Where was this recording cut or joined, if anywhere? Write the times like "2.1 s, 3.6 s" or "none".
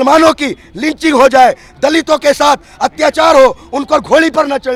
none